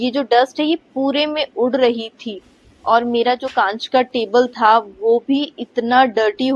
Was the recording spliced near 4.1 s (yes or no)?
no